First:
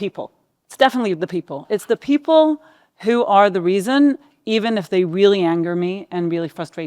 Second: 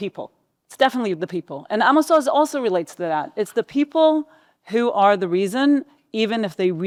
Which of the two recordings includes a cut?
first; 1 cut; at 1.6 s

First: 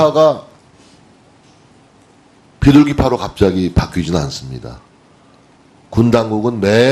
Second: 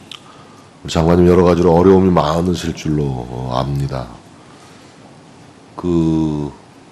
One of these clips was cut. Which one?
first; 1 cut; at 1.3 s

